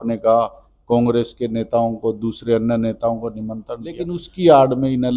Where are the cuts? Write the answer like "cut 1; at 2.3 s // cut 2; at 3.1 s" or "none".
cut 1; at 4.2 s